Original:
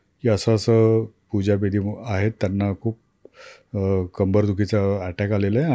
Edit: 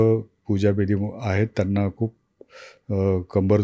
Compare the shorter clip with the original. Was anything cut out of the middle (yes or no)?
no